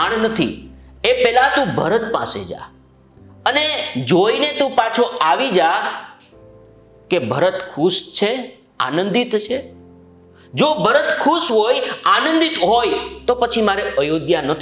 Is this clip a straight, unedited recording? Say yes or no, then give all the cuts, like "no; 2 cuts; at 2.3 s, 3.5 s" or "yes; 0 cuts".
yes; 0 cuts